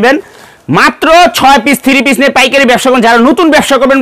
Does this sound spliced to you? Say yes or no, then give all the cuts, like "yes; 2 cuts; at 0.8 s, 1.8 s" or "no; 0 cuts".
no; 0 cuts